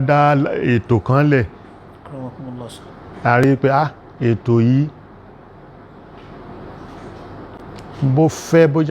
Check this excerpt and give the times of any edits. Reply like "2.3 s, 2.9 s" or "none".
none